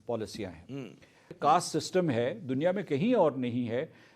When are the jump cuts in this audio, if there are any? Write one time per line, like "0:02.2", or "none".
0:01.3